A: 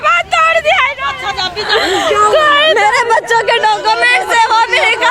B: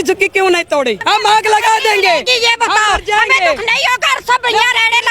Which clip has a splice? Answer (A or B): B